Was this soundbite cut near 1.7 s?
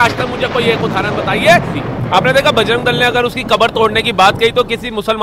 yes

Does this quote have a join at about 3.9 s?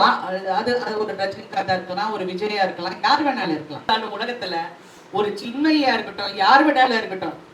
yes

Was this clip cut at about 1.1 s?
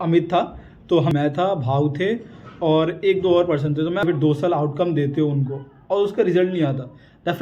yes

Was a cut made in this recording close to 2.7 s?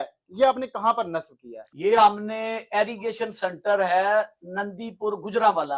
no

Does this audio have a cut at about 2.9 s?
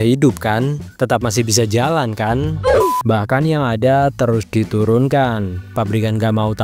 yes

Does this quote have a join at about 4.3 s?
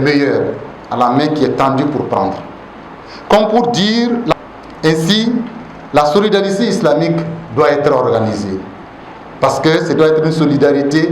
yes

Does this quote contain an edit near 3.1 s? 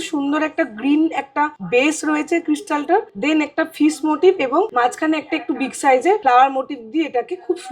yes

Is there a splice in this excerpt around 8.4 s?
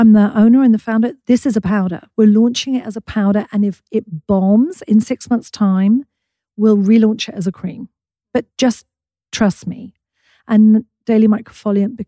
yes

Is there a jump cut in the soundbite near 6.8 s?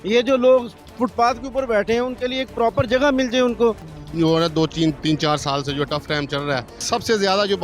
yes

